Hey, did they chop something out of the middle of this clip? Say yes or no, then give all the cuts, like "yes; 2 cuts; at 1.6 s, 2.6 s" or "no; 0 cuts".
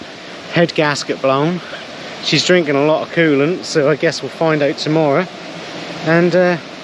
no; 0 cuts